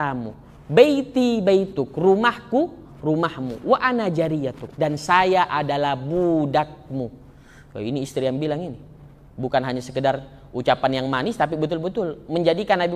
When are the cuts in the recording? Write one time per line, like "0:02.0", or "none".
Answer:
none